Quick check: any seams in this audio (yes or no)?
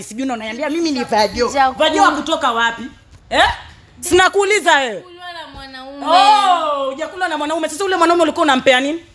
no